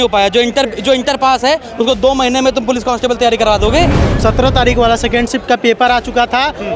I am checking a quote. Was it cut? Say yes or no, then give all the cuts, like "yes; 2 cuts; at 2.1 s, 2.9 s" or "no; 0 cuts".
yes; 1 cut; at 4.1 s